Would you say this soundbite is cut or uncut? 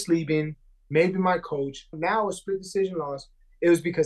cut